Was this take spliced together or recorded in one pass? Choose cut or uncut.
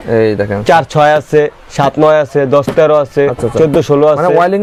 uncut